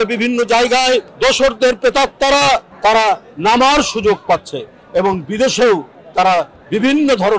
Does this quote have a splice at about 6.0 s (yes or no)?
yes